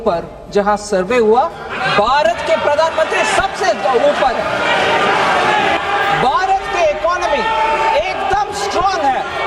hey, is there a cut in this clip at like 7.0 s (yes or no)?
no